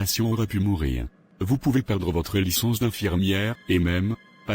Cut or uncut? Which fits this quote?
cut